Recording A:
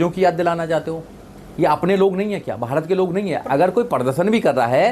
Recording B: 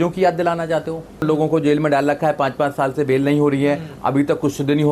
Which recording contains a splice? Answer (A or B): B